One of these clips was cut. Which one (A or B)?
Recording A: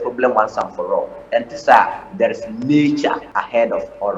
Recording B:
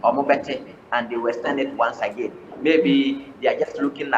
A